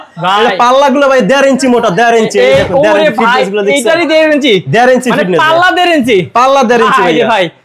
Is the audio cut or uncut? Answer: uncut